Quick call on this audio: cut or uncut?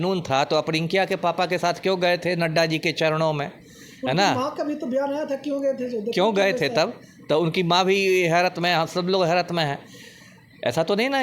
uncut